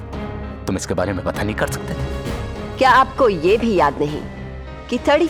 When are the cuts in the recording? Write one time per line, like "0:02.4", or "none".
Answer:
none